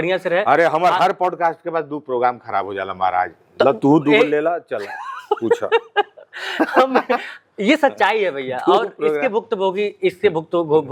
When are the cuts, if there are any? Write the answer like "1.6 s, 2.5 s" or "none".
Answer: none